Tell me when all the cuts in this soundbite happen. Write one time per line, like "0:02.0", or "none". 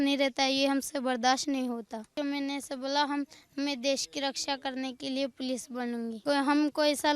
0:02.1
0:06.2